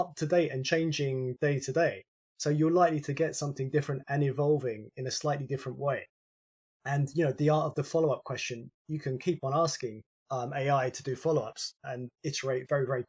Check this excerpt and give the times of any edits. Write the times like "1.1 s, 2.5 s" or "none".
none